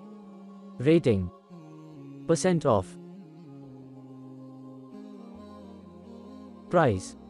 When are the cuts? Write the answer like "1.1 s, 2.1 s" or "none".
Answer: none